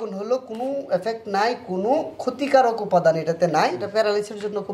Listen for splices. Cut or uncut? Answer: cut